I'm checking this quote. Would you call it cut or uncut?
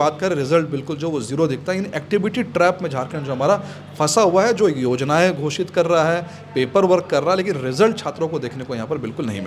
uncut